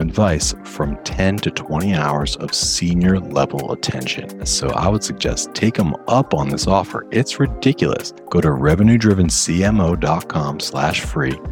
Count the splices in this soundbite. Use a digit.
2